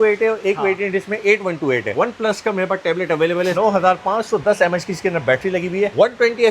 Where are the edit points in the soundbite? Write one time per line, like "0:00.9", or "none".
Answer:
0:01.9
0:03.5